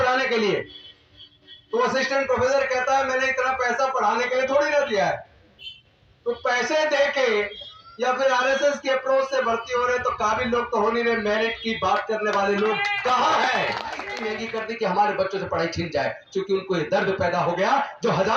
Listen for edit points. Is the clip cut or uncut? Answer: cut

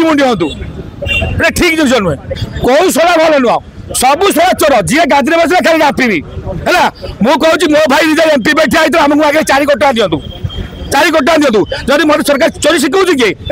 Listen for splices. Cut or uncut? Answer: cut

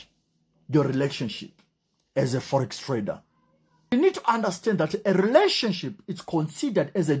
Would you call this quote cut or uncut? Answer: cut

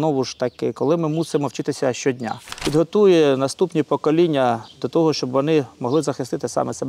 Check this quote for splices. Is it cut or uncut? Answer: cut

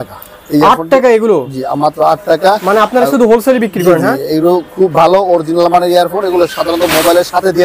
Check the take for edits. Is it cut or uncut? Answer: uncut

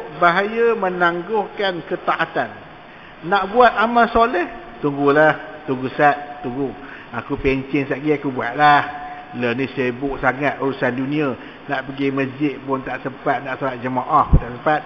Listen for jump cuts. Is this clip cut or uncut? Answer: uncut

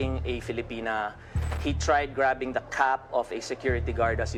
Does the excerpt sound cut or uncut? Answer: uncut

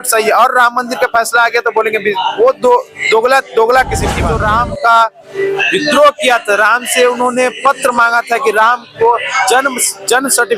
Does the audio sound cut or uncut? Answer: cut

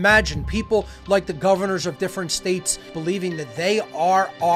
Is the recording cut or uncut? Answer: uncut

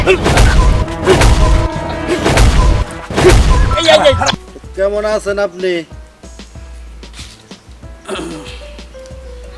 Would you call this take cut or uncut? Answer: cut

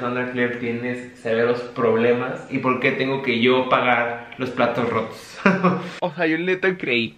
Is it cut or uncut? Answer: cut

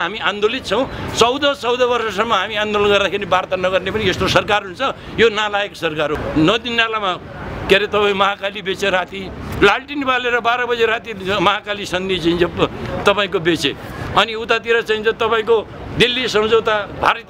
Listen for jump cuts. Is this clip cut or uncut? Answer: cut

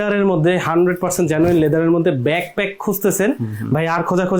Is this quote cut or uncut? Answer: uncut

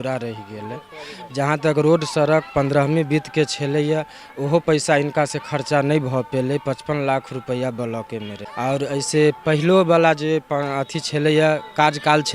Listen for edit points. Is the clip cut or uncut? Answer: cut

